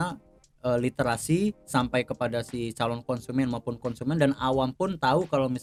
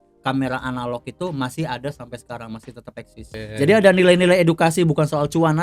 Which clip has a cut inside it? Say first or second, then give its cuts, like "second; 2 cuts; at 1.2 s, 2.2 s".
second; 1 cut; at 3.4 s